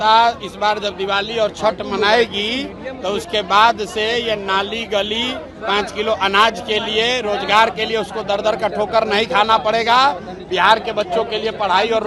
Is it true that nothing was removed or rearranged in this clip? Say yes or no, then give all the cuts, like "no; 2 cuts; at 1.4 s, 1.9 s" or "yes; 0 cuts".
yes; 0 cuts